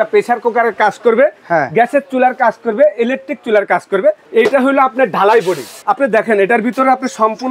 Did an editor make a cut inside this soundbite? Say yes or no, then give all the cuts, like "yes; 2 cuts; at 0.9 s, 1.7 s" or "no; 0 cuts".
yes; 2 cuts; at 4.2 s, 5.7 s